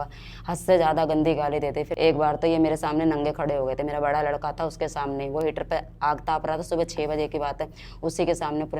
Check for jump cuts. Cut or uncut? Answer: cut